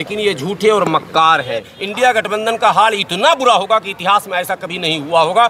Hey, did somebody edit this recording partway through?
yes; 1 cut; at 1.8 s

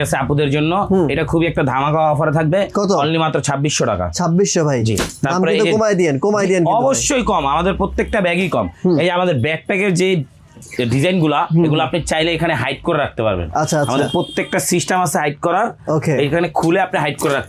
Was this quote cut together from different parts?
no; 0 cuts

